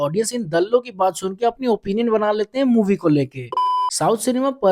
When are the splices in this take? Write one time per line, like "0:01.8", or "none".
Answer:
0:03.5